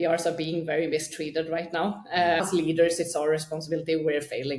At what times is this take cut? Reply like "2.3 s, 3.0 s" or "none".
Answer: 2.4 s